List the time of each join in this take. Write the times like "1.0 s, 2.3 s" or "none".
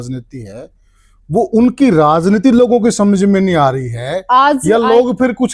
none

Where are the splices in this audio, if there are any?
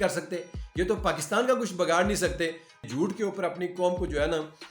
2.8 s

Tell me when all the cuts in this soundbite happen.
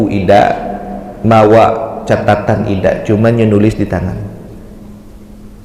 none

